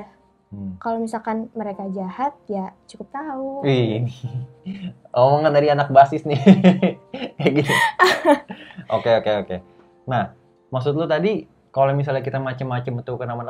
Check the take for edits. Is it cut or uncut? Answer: uncut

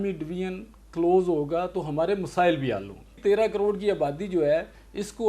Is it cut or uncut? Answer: cut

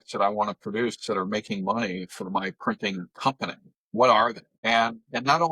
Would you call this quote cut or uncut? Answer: cut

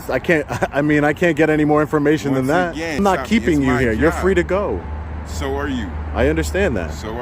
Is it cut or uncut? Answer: cut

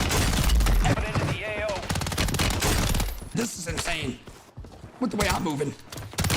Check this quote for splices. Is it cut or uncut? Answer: cut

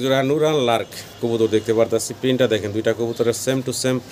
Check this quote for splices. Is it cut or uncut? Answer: uncut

